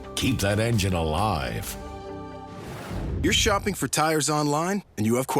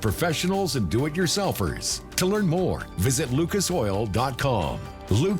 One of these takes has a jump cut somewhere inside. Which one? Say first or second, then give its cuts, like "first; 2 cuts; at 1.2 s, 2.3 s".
first; 1 cut; at 3.2 s